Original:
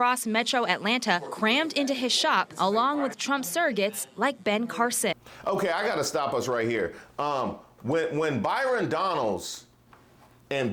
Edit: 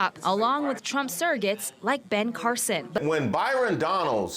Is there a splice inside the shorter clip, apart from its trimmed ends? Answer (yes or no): yes